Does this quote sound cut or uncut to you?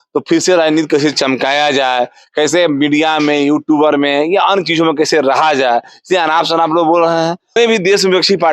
cut